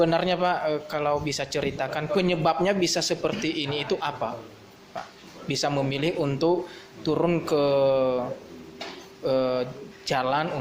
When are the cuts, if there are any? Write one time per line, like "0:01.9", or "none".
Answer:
none